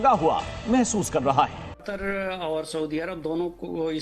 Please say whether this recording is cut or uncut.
cut